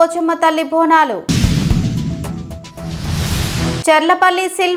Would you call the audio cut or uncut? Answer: uncut